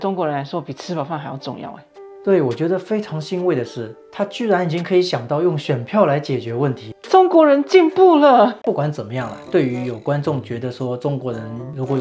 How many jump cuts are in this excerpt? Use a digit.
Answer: 1